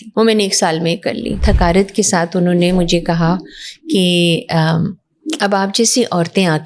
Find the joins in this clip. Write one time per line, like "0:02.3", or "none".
0:01.4